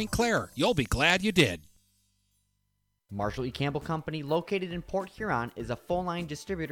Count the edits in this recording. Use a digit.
1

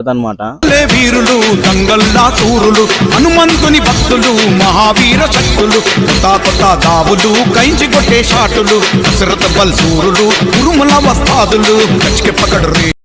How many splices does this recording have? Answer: 0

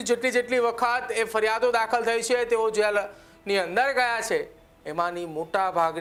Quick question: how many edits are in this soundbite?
0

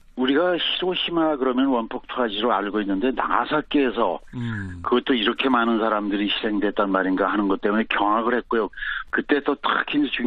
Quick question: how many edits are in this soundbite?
1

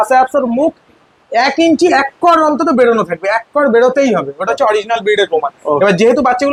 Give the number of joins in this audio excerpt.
0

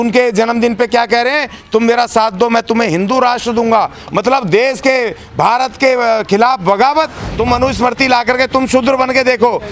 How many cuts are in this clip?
1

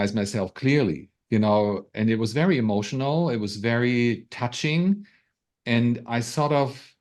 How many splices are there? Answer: 0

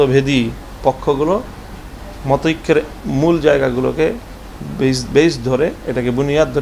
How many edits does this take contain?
0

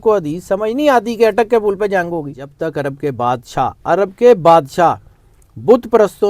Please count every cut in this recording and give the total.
1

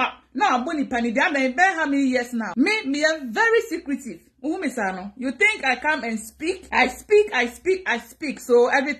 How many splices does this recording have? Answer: 2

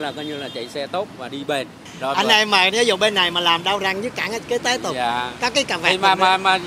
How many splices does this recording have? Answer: 0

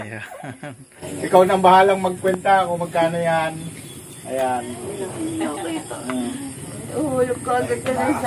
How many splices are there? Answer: 1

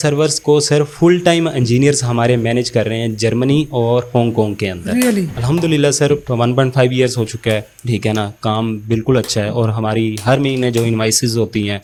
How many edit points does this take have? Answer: 0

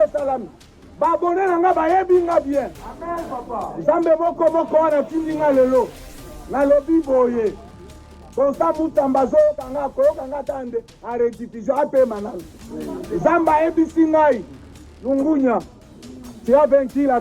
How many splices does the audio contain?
0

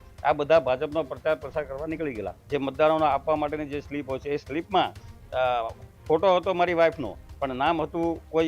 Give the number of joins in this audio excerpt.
1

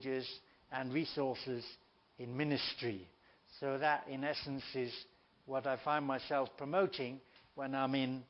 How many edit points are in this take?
0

